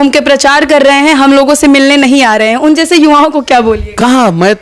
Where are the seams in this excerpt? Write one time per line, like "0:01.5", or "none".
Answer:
none

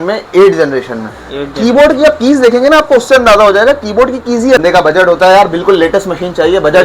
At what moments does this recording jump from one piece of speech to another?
0:04.6

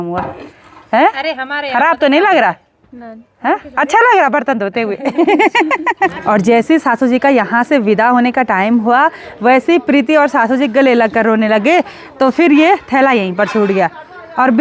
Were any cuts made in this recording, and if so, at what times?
0:06.1

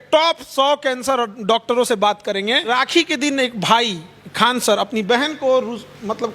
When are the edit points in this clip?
0:02.7

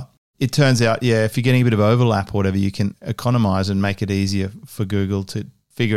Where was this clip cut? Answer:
0:01.3
0:03.1

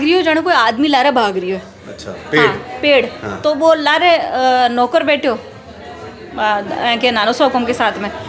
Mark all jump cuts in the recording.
none

